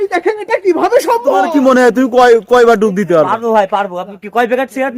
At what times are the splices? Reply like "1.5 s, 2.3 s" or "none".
1.4 s